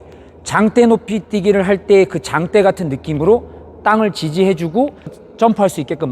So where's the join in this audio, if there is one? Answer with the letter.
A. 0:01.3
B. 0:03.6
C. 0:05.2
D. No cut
C